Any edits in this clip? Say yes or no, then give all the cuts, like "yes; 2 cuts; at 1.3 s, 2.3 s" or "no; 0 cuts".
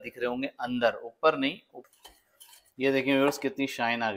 yes; 1 cut; at 1.7 s